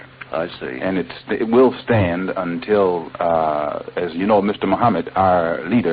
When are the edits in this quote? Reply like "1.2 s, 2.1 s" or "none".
3.6 s